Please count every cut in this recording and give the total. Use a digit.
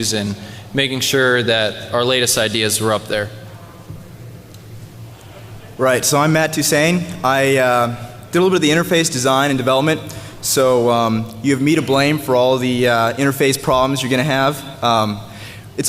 1